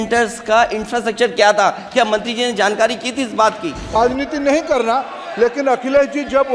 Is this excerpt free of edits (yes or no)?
no